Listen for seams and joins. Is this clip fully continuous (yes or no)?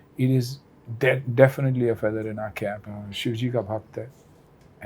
no